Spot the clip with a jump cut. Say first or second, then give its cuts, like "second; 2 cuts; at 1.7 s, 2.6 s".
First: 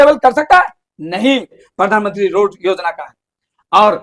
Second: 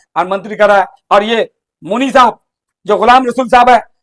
first; 1 cut; at 1.6 s